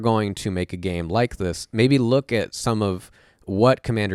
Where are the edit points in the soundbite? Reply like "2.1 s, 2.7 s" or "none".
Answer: none